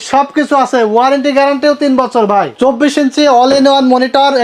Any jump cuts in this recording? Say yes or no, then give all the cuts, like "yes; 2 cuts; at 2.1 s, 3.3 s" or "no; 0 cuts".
yes; 1 cut; at 2.5 s